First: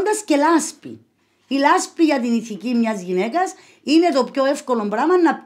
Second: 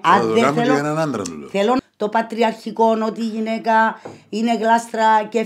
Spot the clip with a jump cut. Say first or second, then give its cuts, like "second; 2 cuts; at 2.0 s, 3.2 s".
second; 1 cut; at 1.8 s